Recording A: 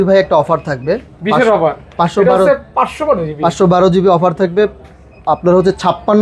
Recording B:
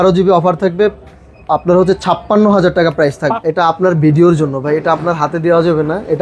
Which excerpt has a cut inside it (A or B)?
B